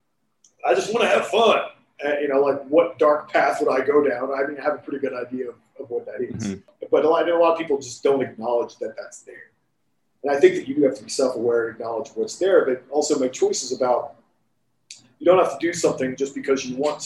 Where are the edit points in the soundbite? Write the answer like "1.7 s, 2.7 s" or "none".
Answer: 6.7 s